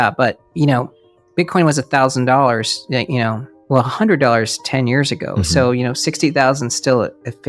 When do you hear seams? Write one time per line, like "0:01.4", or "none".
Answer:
0:03.5